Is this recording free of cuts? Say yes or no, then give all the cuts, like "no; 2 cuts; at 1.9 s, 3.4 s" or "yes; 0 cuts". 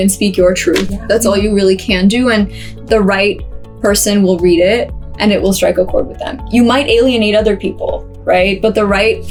yes; 0 cuts